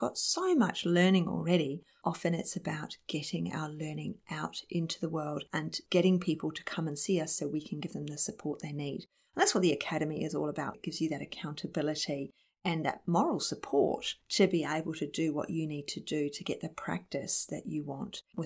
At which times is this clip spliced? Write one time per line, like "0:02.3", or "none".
0:10.8